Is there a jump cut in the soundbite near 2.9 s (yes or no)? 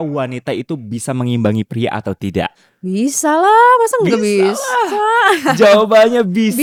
no